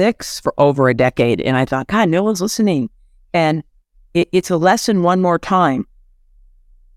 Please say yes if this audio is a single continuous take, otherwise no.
yes